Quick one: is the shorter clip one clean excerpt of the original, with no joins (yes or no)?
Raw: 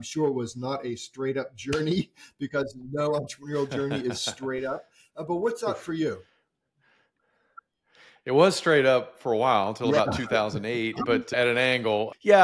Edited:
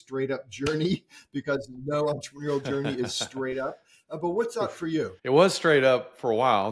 no